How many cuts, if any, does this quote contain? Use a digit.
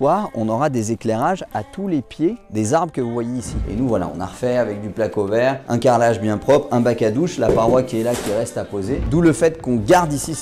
2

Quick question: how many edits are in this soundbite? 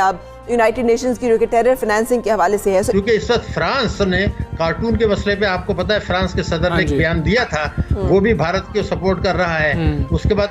1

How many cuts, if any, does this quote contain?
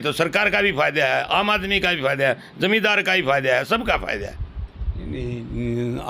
0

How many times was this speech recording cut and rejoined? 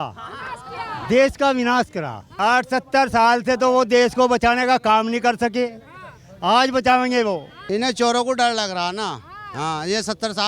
2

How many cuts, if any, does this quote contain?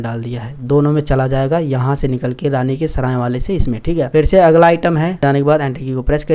1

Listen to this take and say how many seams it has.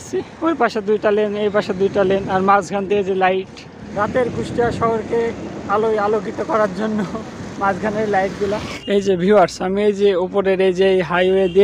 1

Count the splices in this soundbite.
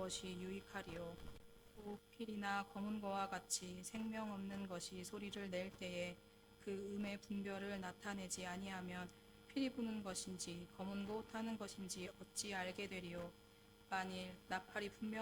1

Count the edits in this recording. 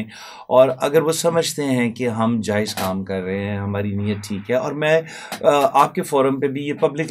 0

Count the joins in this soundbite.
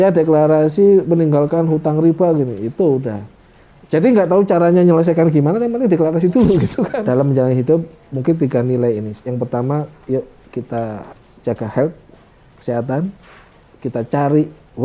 1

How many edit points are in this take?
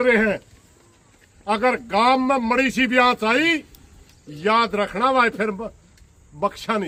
0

